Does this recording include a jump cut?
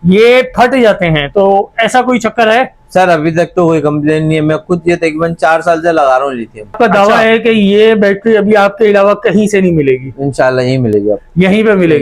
yes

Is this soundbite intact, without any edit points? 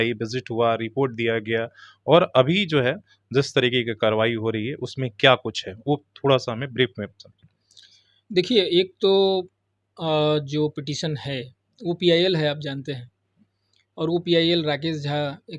yes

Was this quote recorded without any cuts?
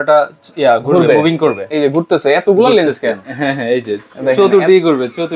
no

